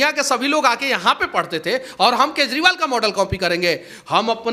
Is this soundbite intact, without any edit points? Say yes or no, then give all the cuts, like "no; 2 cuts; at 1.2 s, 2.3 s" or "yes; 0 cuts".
yes; 0 cuts